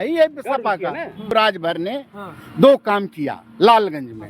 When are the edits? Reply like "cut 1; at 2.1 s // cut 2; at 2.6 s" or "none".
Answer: cut 1; at 1.3 s